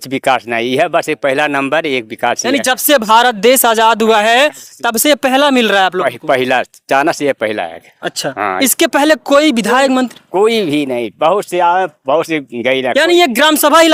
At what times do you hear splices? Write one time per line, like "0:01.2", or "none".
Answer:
none